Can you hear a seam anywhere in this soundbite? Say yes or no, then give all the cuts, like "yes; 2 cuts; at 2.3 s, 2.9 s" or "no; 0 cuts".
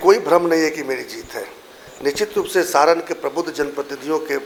no; 0 cuts